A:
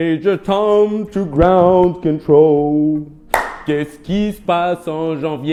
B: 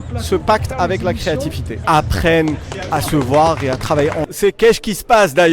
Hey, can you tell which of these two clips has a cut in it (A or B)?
B